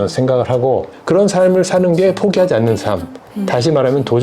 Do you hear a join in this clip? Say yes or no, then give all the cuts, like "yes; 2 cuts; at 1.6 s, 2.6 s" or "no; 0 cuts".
yes; 1 cut; at 0.9 s